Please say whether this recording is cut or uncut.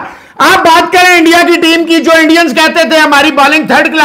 uncut